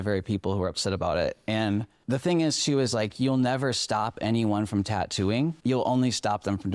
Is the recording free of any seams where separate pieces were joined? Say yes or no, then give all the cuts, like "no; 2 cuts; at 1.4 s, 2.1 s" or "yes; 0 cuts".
no; 1 cut; at 5.6 s